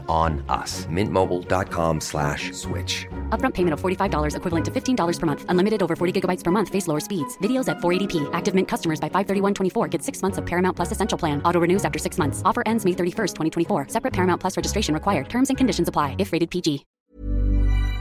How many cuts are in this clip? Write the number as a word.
one